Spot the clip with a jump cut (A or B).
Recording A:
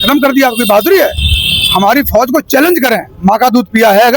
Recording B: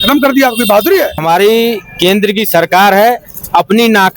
B